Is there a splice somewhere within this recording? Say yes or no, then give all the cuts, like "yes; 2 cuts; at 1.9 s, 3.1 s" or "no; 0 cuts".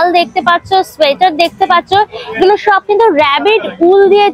no; 0 cuts